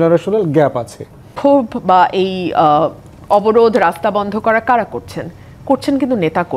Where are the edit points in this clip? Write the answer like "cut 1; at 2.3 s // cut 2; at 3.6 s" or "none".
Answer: cut 1; at 1.4 s